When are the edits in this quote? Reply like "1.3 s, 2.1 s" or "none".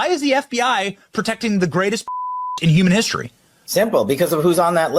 2.6 s